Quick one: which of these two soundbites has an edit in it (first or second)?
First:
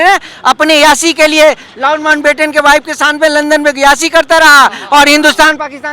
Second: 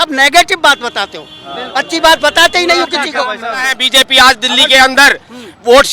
second